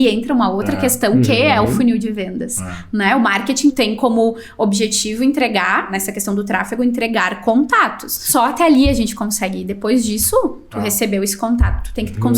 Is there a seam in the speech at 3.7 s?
yes; 3 cuts; at 3.7 s, 5.9 s, 8.2 s

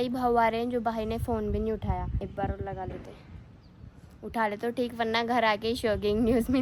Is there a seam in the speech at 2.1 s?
yes; 1 cut; at 2.1 s

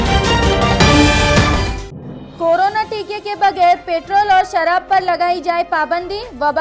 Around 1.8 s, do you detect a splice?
yes; 1 cut; at 1.8 s

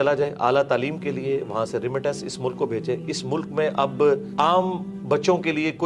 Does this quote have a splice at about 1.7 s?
no; 1 cut; at 4.3 s

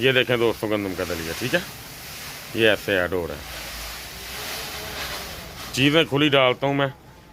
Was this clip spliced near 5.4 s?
no; 0 cuts

